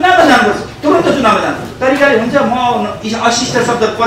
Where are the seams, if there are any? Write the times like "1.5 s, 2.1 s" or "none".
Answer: 1.7 s